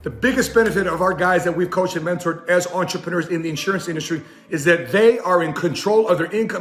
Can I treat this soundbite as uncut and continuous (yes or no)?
yes